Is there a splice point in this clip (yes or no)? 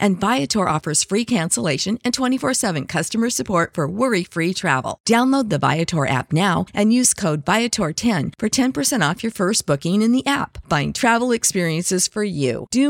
no